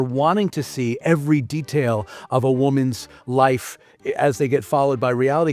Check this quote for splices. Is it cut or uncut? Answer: uncut